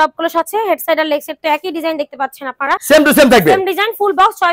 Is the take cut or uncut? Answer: uncut